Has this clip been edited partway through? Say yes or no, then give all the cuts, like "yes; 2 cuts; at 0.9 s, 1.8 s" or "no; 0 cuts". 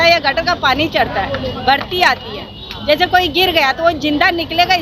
no; 0 cuts